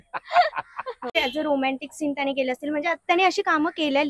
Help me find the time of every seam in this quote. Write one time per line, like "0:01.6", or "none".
0:01.1